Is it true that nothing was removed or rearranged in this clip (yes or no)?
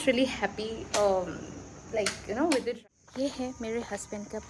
no